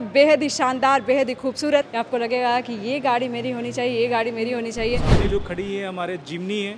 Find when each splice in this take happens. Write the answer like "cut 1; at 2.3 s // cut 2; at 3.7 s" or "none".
cut 1; at 1.9 s // cut 2; at 5.1 s

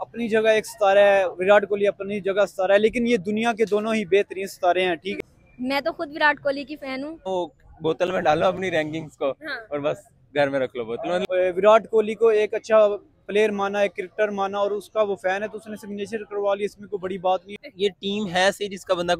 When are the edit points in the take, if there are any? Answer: cut 1; at 5.1 s // cut 2; at 7.3 s // cut 3; at 11.3 s // cut 4; at 17.6 s

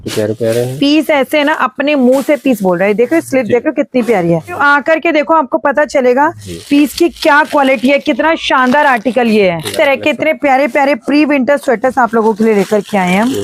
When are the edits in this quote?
cut 1; at 4.6 s // cut 2; at 9.7 s

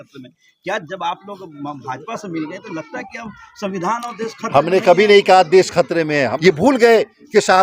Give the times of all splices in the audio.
cut 1; at 6.3 s

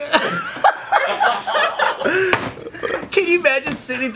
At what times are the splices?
cut 1; at 2.0 s

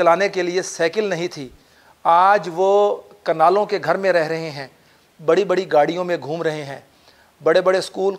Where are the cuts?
none

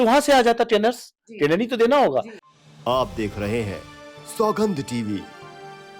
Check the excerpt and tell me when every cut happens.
cut 1; at 2.4 s

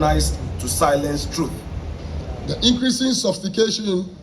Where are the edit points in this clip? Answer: cut 1; at 2.4 s

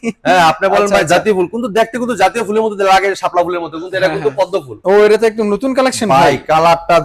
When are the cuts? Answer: cut 1; at 4.7 s

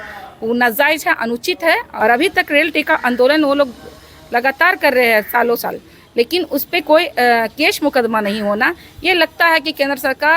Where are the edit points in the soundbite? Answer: cut 1; at 1.9 s

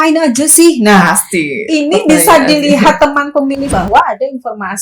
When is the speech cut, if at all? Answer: cut 1; at 3.7 s

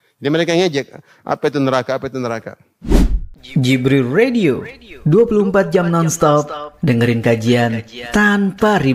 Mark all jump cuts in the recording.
cut 1; at 2.7 s

